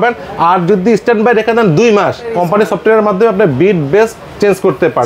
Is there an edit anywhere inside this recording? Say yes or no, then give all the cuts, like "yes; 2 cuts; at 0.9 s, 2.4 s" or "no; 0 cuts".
yes; 1 cut; at 2.4 s